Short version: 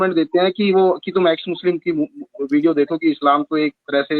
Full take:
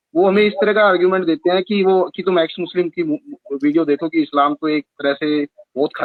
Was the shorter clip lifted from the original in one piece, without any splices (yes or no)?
yes